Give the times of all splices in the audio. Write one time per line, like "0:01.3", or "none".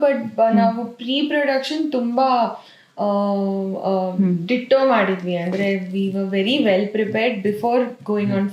none